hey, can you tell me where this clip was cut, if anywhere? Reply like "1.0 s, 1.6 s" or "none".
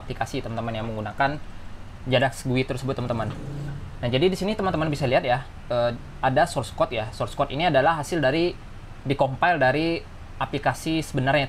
none